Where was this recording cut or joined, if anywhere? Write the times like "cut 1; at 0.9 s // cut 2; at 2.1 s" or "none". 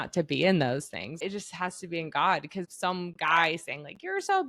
cut 1; at 1.2 s // cut 2; at 2.7 s